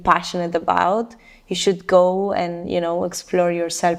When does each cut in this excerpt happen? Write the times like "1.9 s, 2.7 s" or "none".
none